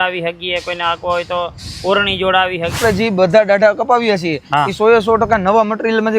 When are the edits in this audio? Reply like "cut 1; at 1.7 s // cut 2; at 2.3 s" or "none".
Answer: cut 1; at 2.8 s